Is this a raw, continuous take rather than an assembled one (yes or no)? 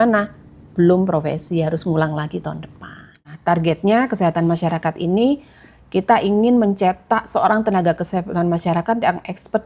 no